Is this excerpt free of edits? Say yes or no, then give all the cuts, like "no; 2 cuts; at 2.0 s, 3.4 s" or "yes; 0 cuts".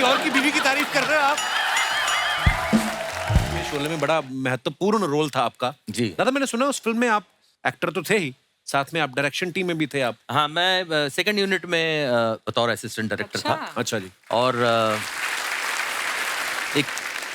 no; 1 cut; at 3.7 s